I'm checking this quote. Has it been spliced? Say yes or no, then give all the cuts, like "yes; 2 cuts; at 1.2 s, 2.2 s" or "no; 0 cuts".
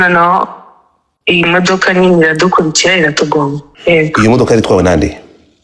yes; 1 cut; at 3.7 s